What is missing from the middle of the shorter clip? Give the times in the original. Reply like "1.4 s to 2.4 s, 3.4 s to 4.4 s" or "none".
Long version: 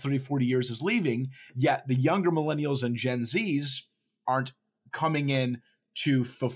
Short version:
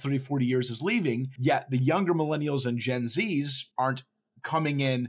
1.3 s to 1.5 s, 3.8 s to 4.1 s

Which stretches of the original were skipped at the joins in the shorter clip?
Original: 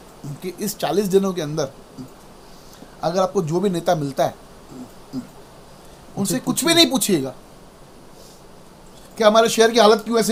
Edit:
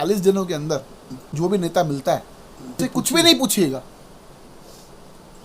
2.2 s to 3.5 s, 4.9 s to 6.3 s

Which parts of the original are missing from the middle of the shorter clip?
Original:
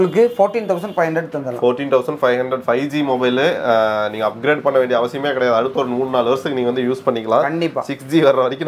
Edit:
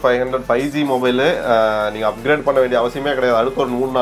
none

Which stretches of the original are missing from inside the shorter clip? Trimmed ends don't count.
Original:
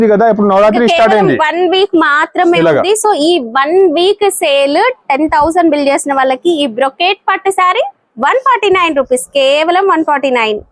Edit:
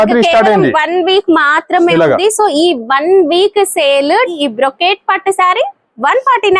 5.0 s to 6.5 s

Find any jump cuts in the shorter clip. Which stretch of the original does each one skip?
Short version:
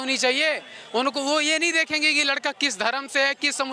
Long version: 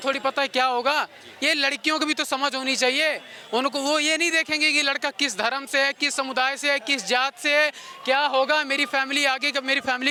none

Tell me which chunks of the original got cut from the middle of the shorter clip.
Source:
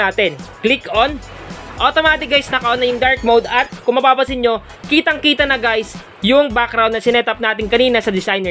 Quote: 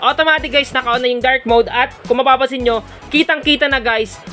none

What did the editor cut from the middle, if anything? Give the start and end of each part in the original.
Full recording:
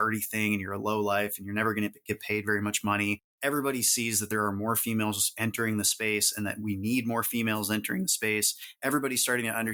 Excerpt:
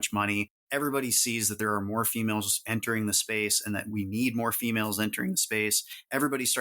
none

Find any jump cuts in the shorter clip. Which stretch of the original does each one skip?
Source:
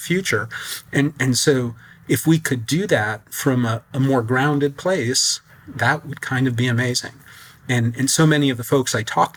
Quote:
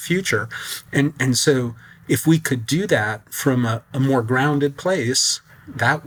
none

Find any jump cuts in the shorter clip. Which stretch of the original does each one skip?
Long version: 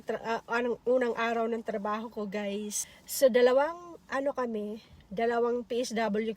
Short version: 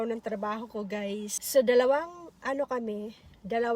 2.8 s to 3.0 s

